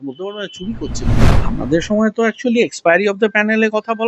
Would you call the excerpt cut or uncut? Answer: cut